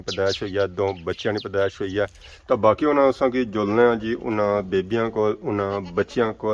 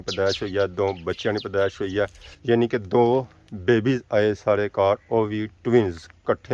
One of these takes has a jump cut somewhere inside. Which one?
first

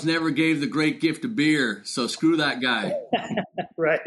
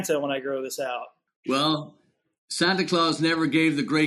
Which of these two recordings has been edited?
second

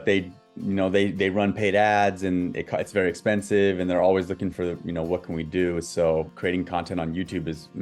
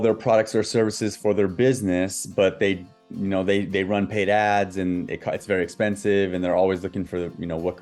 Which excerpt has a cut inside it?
first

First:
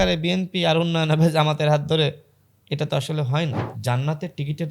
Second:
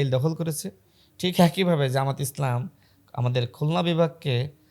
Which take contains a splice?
first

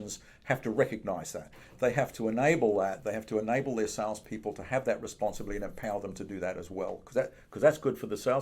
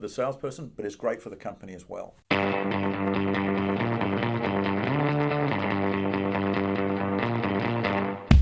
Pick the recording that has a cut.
second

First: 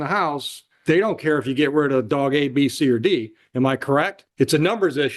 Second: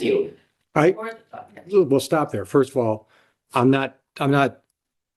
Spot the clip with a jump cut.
first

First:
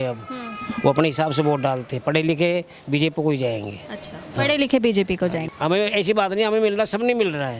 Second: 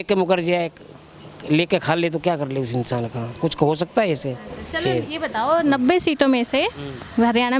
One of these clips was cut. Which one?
first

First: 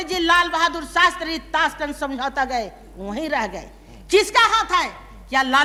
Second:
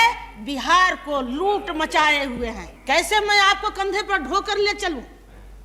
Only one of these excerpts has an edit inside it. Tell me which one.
second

